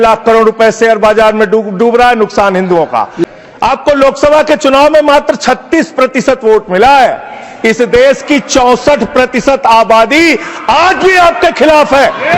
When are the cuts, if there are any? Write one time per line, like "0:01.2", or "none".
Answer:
0:03.2